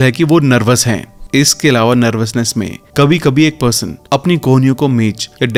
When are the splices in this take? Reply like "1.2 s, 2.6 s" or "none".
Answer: none

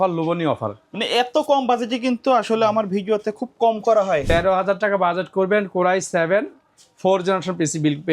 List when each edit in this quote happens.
4.2 s

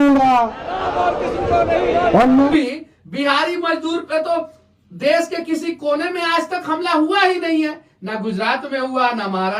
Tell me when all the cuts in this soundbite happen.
2.5 s

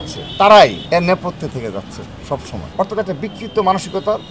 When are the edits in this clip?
none

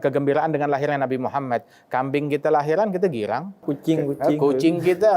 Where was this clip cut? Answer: 3.7 s

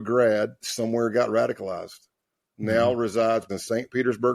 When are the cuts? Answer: 3.5 s

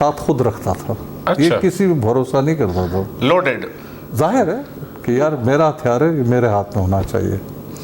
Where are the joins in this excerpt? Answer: none

